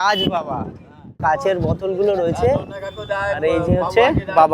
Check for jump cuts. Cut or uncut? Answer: cut